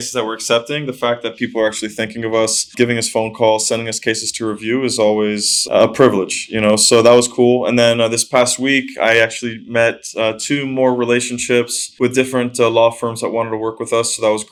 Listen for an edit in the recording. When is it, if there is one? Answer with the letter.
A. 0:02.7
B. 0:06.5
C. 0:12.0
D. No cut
D